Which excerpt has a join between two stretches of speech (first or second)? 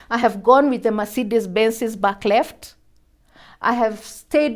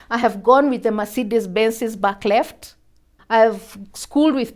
second